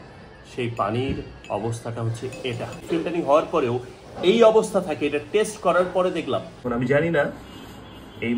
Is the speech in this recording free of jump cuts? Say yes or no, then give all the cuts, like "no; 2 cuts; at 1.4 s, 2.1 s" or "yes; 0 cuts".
no; 2 cuts; at 2.8 s, 6.6 s